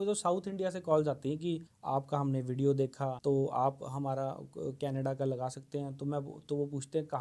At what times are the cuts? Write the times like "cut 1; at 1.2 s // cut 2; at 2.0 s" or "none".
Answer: cut 1; at 1.7 s // cut 2; at 3.2 s